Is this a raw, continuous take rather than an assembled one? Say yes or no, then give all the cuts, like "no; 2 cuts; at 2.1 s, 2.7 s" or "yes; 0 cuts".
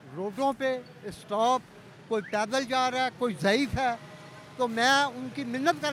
yes; 0 cuts